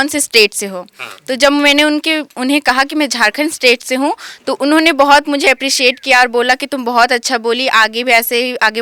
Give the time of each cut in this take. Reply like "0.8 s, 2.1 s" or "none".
none